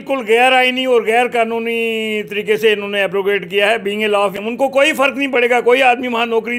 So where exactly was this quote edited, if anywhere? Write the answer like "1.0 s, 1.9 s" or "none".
4.4 s